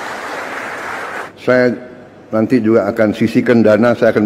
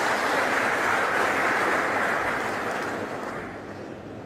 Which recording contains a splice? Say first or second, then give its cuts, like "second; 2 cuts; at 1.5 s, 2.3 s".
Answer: first; 1 cut; at 1.3 s